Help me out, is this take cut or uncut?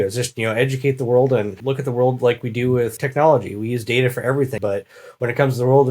cut